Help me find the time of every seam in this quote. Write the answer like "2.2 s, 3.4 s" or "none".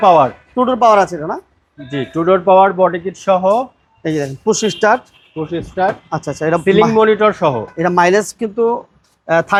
none

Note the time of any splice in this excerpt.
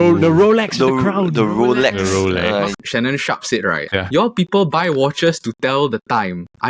2.7 s, 3.8 s

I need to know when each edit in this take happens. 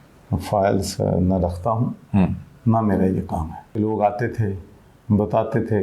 3.6 s

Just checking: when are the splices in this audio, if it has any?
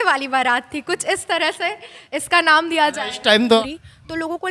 3.6 s

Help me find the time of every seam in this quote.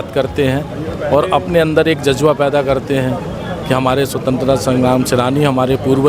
none

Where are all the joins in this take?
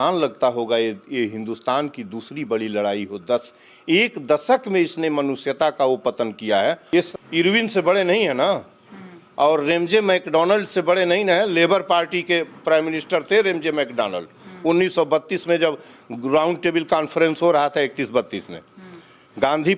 7.0 s

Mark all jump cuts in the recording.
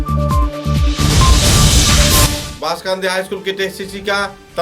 2.3 s

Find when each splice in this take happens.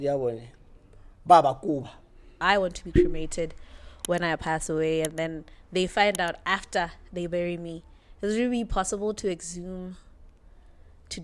2.3 s

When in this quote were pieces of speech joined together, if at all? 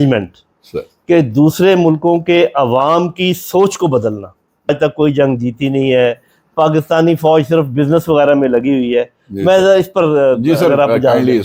4.7 s

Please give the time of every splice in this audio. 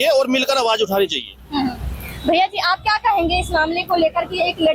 none

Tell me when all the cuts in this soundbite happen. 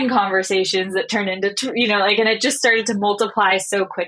none

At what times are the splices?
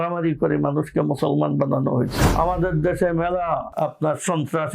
2.2 s, 3.7 s

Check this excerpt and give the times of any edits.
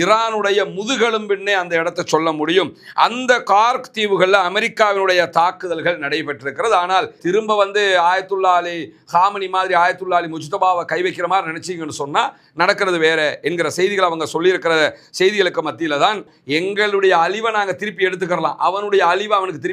7.2 s, 16.3 s

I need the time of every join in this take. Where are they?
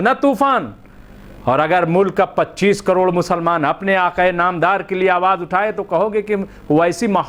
none

